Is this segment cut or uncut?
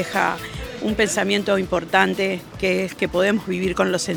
uncut